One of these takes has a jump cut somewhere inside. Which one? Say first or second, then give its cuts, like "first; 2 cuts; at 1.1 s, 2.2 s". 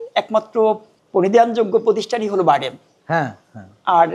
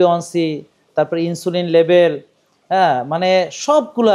first; 1 cut; at 0.9 s